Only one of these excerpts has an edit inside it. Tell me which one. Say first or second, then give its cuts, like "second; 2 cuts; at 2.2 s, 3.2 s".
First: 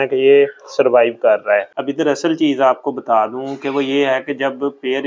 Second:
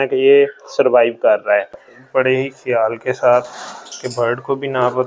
second; 1 cut; at 1.8 s